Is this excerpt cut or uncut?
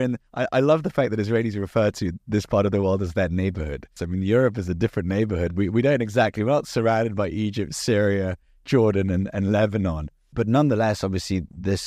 cut